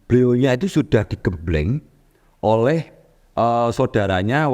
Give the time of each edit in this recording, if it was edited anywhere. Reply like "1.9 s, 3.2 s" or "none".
none